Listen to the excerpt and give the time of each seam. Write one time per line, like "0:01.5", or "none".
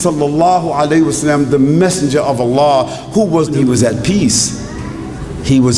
0:03.5

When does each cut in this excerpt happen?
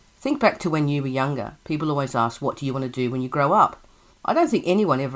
none

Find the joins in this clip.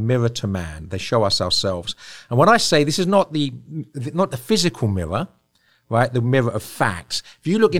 none

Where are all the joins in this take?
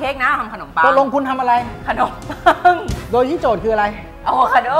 0:02.9

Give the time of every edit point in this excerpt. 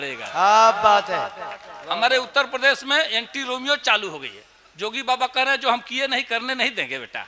none

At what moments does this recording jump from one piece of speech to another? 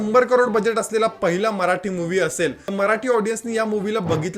0:02.6

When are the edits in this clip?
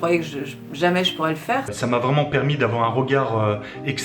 0:01.7

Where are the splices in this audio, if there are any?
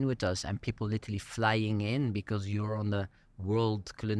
none

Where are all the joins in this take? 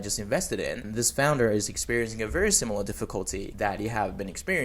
0:00.9
0:03.5

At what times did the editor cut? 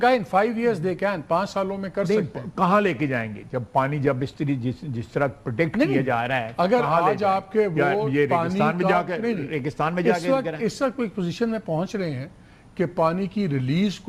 none

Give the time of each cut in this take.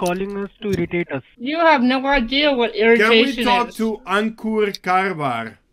0:01.3

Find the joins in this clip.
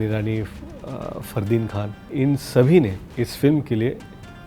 0:02.1
0:03.0

